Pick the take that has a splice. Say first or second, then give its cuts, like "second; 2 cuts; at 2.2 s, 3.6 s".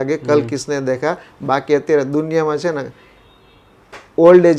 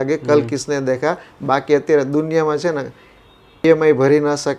second; 1 cut; at 3.6 s